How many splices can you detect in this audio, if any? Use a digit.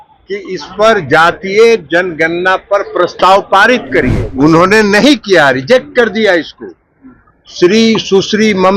1